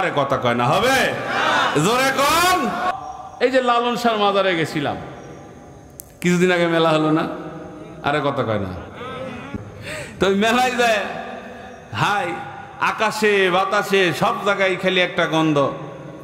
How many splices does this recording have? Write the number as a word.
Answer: two